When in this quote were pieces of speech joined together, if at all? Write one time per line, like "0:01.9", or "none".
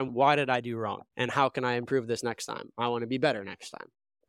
0:01.0